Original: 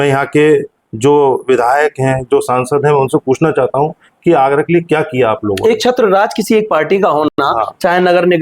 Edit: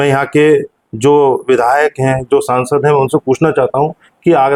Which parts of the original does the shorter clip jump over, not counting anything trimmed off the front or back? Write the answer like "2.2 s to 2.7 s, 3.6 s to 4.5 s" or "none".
none